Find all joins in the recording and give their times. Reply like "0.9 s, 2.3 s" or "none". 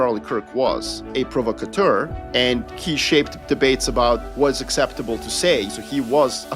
1.0 s, 2.4 s, 4.3 s, 5.7 s